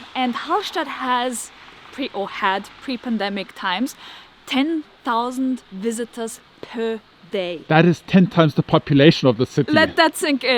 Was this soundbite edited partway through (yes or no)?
no